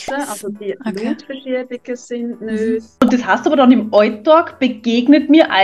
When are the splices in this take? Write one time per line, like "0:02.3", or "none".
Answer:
0:02.9